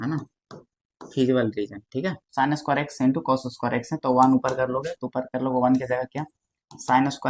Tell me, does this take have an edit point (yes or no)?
yes